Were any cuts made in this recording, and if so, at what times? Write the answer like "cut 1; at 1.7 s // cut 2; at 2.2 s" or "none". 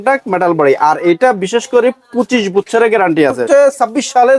cut 1; at 3.4 s